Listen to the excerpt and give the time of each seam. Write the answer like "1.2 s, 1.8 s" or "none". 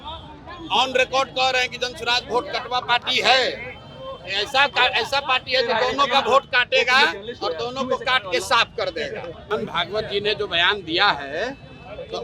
9.5 s